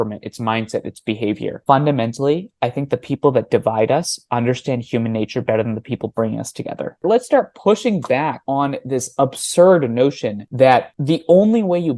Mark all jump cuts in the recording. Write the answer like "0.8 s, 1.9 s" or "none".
1.6 s, 7.0 s